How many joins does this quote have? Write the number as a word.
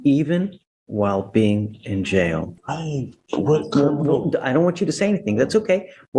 one